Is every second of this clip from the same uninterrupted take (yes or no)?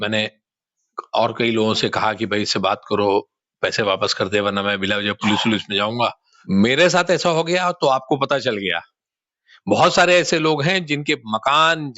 no